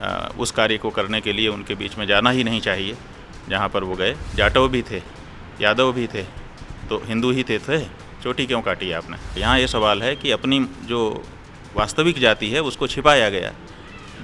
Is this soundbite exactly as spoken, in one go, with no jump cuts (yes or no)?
no